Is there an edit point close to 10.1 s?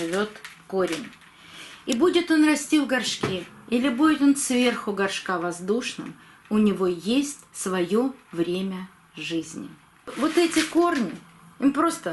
yes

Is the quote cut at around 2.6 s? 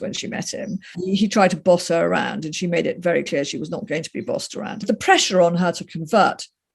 no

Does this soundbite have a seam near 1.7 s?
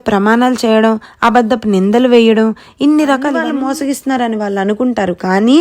no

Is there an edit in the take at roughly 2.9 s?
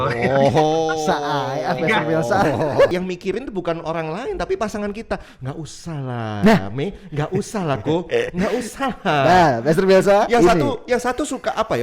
yes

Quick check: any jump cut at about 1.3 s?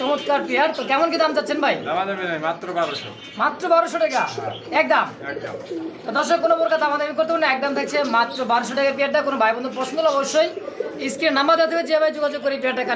no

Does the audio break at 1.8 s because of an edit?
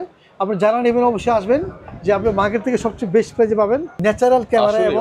no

